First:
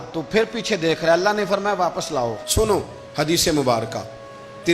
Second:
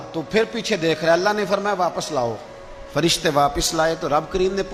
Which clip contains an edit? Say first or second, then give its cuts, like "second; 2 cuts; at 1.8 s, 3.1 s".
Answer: first; 1 cut; at 2.4 s